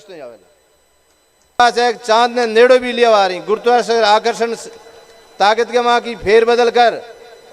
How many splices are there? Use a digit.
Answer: 1